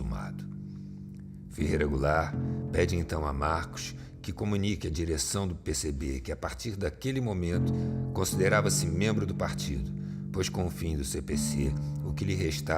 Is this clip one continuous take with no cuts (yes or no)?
yes